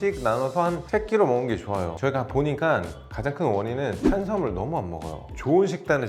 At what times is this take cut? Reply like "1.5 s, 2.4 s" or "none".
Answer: 1.9 s, 5.2 s